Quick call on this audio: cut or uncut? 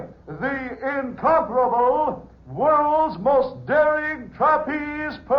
cut